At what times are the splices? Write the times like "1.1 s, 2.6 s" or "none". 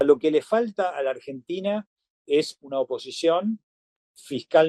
none